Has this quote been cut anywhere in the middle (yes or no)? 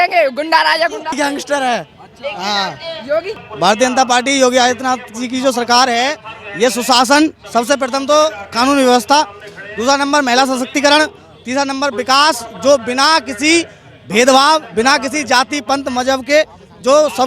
yes